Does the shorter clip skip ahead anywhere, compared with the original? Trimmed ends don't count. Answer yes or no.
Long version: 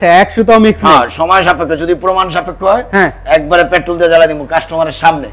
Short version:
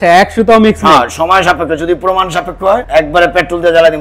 yes